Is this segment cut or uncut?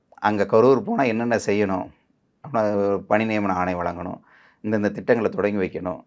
uncut